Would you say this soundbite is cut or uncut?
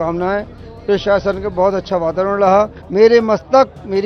cut